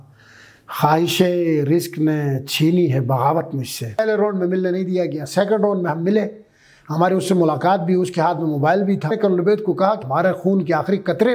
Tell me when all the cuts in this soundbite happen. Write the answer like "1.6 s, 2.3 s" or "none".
4.0 s, 9.1 s